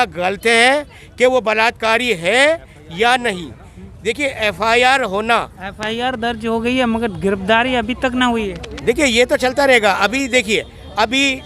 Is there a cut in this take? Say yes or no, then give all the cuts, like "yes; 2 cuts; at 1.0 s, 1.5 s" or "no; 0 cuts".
no; 0 cuts